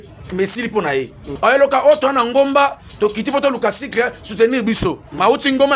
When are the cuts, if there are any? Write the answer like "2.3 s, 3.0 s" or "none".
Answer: 1.2 s